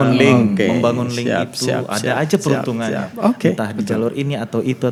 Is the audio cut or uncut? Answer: uncut